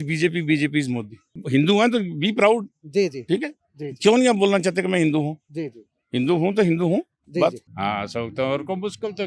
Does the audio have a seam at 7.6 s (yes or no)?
yes